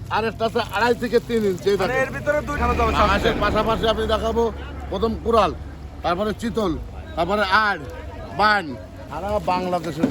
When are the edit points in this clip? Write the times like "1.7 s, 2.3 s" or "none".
2.6 s, 9.0 s